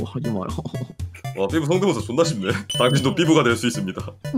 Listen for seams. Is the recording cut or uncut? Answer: uncut